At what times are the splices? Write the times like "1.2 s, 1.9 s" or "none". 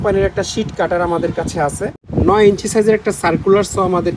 2.0 s